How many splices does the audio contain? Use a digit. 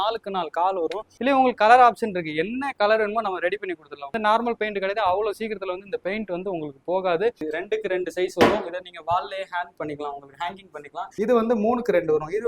4